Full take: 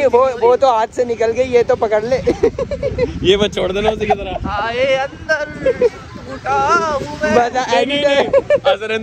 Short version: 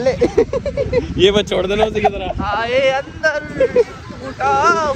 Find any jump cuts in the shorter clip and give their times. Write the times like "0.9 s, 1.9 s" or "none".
none